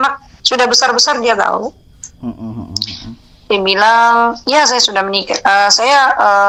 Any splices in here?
no; 0 cuts

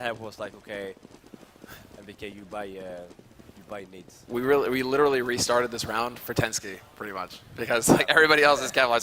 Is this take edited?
no; 0 cuts

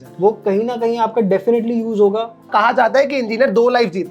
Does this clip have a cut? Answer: yes; 1 cut; at 2.5 s

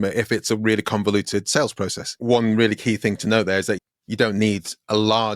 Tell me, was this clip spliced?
yes; 2 cuts; at 2.1 s, 3.8 s

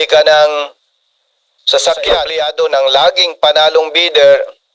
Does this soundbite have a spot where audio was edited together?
yes; 1 cut; at 2.3 s

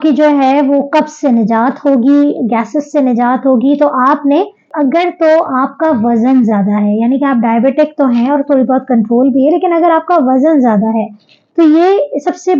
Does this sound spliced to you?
yes; 1 cut; at 4.7 s

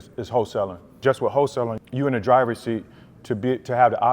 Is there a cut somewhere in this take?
yes; 2 cuts; at 1.0 s, 1.8 s

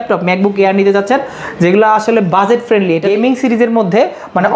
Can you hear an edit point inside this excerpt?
yes; 1 cut; at 3.0 s

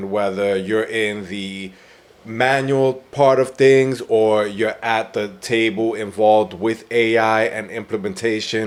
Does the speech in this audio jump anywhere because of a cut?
no; 0 cuts

